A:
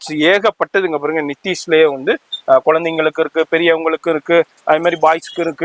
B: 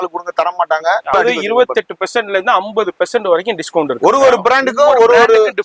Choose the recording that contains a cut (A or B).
B